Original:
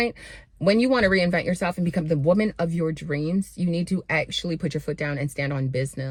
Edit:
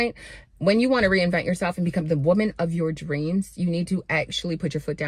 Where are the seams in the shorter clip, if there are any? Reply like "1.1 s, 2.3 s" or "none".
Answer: none